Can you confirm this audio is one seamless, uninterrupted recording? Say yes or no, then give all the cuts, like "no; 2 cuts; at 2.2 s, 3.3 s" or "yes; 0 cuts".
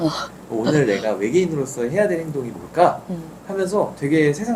yes; 0 cuts